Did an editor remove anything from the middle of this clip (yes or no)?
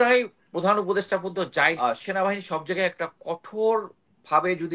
yes